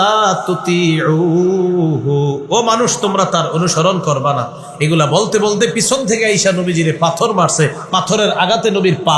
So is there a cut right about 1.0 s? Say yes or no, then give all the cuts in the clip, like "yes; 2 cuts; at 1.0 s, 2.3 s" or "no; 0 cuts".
no; 0 cuts